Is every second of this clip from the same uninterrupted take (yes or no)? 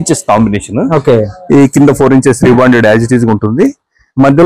yes